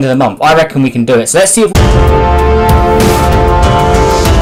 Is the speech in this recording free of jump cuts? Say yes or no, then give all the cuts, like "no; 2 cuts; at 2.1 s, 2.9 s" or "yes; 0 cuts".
yes; 0 cuts